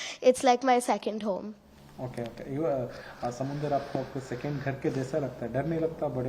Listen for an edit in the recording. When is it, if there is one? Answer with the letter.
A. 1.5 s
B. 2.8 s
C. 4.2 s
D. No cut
D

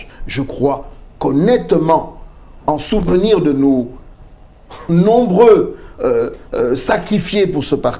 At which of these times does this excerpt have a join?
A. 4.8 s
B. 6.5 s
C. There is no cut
C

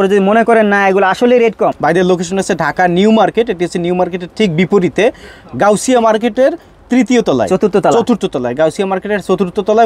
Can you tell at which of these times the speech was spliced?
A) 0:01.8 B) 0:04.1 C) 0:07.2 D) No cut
A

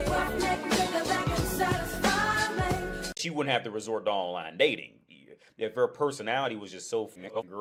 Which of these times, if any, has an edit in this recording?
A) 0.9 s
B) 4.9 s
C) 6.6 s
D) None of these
D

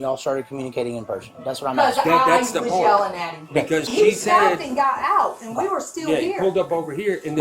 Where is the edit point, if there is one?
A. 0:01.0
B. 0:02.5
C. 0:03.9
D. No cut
C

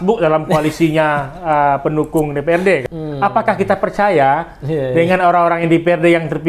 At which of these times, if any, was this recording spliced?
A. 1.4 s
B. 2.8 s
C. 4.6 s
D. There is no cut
B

